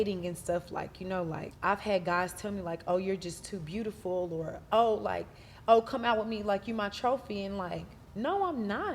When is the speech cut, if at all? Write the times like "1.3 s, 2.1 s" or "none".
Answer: 1.5 s